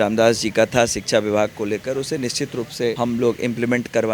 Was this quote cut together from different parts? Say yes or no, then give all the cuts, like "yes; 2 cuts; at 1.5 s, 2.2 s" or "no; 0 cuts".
yes; 1 cut; at 3.0 s